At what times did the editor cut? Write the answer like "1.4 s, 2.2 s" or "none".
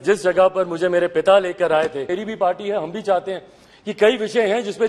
2.2 s